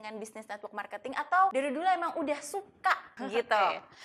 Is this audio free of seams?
no; 2 cuts; at 1.5 s, 3.1 s

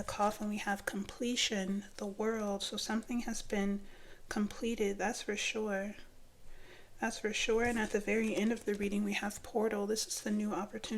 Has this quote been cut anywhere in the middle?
no; 0 cuts

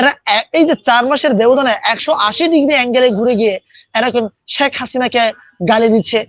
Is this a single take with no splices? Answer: yes; 0 cuts

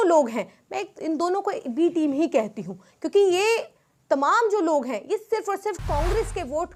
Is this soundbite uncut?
yes; 0 cuts

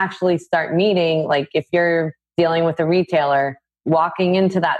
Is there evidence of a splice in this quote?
yes; 2 cuts; at 2.2 s, 3.7 s

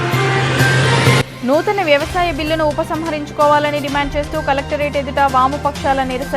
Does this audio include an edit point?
no; 0 cuts

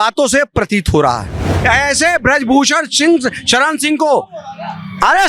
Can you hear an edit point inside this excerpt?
yes; 1 cut; at 1.6 s

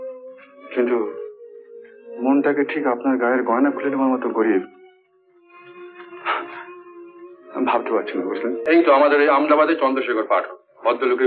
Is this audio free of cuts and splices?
no; 1 cut; at 8.7 s

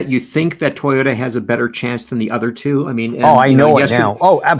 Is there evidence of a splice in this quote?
no; 0 cuts

